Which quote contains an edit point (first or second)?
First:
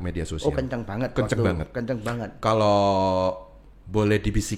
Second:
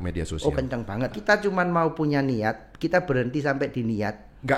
second